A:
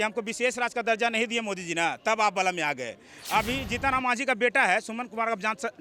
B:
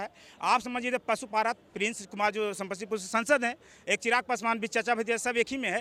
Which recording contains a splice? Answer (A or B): A